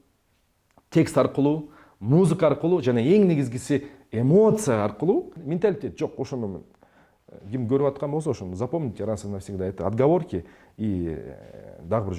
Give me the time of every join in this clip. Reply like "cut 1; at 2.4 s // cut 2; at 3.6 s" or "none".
cut 1; at 5.4 s